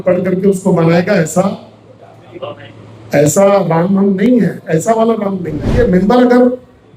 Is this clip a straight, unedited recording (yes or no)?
no